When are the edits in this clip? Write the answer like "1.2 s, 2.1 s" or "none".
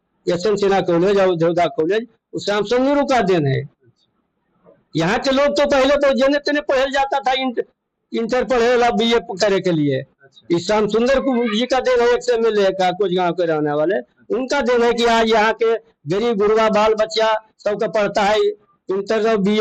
none